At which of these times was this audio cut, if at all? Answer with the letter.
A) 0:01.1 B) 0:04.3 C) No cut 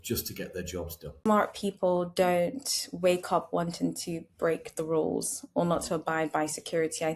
A